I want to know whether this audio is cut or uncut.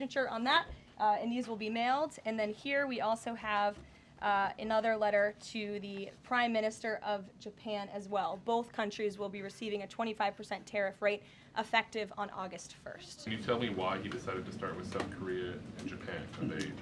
cut